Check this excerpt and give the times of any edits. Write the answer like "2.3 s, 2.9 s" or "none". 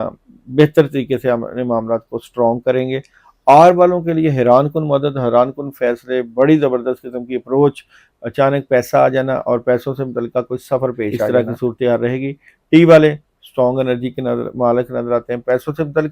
11.3 s